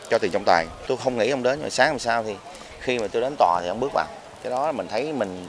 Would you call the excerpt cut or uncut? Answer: cut